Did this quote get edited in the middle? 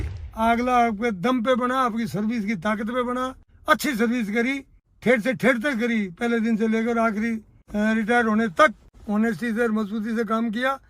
no; 0 cuts

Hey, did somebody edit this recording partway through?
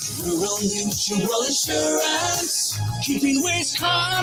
no; 0 cuts

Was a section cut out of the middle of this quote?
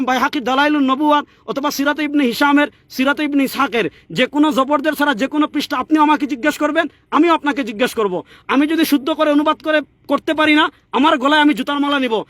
no; 0 cuts

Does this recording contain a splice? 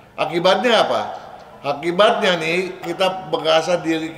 yes; 1 cut; at 2.8 s

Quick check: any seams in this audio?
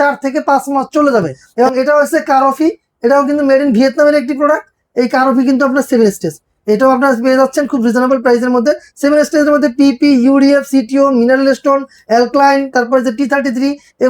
yes; 1 cut; at 1.4 s

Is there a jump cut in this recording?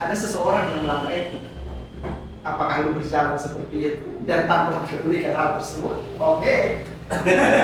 no; 0 cuts

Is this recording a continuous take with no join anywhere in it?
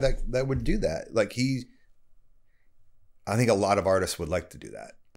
yes; 0 cuts

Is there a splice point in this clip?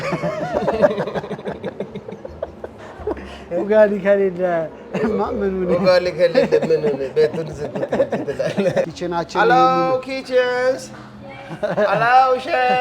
yes; 1 cut; at 8.9 s

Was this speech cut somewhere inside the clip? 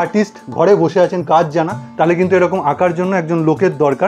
no; 0 cuts

